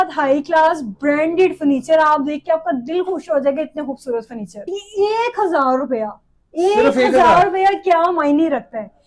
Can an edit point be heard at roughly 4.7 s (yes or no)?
yes